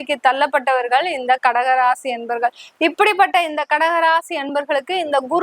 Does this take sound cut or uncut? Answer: uncut